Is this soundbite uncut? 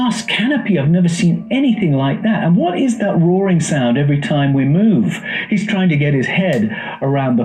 yes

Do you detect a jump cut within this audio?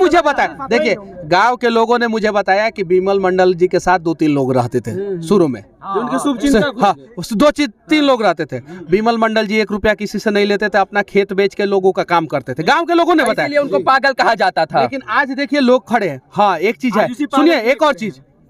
no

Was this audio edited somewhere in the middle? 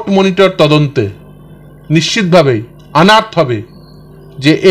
no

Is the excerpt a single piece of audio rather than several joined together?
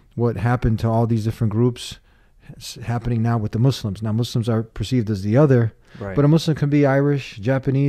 yes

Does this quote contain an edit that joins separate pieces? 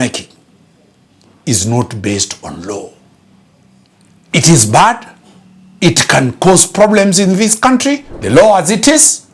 yes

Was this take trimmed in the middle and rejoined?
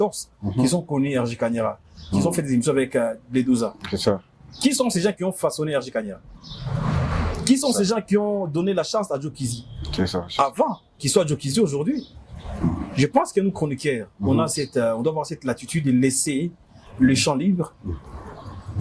no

